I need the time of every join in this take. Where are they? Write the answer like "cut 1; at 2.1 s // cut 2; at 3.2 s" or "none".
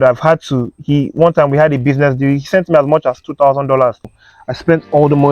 cut 1; at 4.2 s